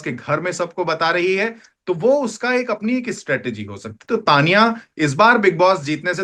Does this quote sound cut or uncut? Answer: uncut